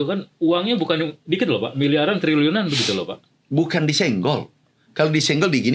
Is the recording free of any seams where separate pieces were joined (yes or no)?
yes